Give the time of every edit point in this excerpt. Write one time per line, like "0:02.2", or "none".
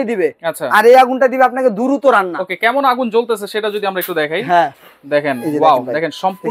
none

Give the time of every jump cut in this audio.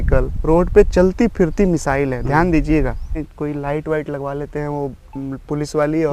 0:03.3

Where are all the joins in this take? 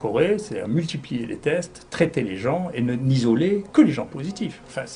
none

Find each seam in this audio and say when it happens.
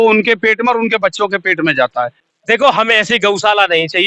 0:02.3

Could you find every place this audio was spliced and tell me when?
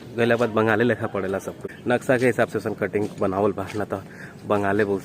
0:01.7

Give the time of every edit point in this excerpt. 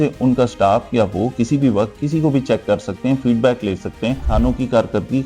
0:04.2

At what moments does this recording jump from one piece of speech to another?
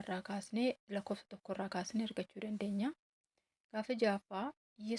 none

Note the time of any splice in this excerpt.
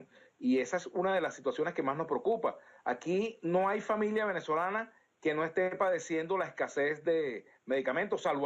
none

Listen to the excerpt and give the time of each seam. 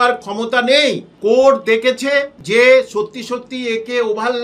0:01.1
0:02.4

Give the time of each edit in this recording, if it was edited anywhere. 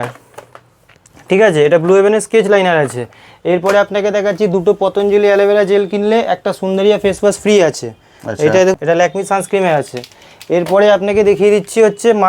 0:08.7

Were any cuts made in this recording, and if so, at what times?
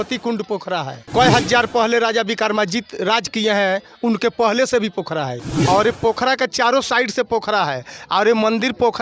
0:01.0
0:05.5

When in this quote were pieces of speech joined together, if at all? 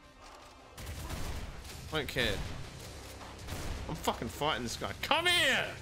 0:01.1

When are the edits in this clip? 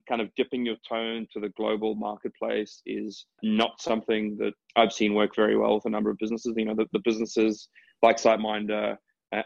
0:03.4
0:04.6

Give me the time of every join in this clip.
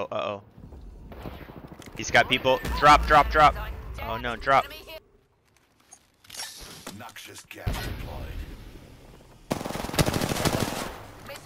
0:05.0

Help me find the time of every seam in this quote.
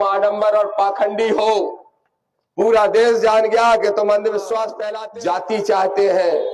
0:04.7

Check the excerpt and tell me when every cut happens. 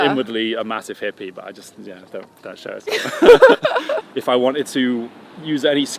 0:04.1

